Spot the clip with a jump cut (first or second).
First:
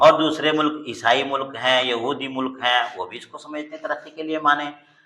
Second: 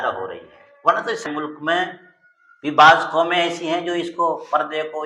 second